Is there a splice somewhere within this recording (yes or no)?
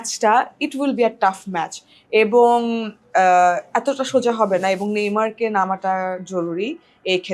no